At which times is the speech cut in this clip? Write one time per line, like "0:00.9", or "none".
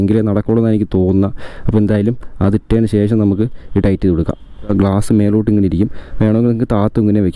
0:04.7